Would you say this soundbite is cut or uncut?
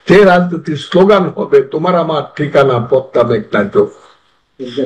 uncut